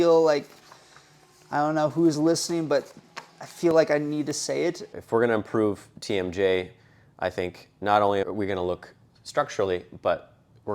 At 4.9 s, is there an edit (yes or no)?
yes